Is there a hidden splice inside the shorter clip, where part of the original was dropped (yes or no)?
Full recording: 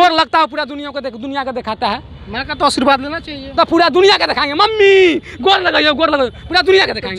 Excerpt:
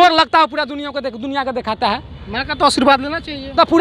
no